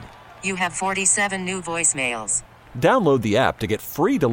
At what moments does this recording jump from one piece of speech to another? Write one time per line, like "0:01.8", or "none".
none